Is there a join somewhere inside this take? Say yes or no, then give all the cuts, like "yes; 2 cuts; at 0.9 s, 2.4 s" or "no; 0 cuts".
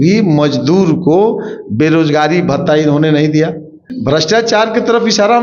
yes; 1 cut; at 3.9 s